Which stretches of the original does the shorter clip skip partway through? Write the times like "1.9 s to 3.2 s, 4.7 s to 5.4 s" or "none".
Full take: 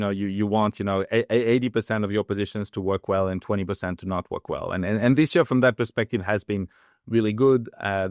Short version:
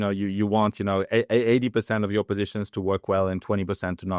none